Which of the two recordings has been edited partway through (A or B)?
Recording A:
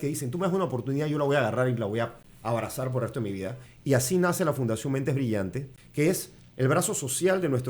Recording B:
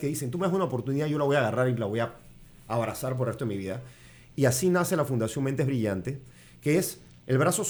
A